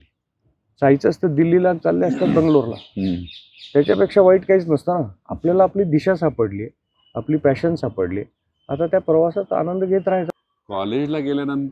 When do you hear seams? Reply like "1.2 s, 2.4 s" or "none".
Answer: 10.3 s